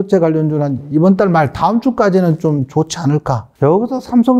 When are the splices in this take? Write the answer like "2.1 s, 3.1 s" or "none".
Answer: 3.4 s